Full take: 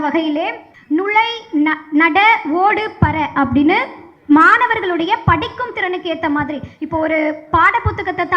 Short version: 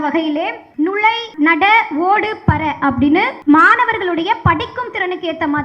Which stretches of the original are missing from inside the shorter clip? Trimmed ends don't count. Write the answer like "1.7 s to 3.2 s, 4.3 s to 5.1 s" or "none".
1.1 s to 1.7 s, 3.9 s to 4.2 s